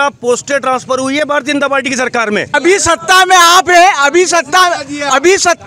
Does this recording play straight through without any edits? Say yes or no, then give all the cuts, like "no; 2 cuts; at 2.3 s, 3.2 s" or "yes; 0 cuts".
no; 1 cut; at 2.5 s